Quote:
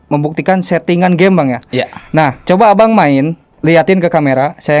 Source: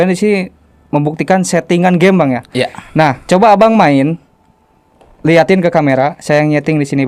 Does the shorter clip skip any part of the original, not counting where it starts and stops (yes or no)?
yes